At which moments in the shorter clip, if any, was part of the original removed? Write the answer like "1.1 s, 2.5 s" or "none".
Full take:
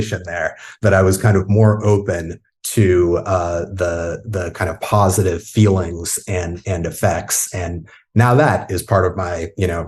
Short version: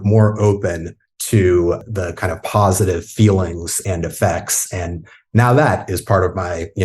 1.8 s, 3.8 s